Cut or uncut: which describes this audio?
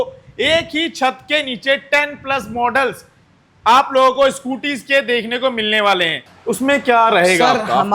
cut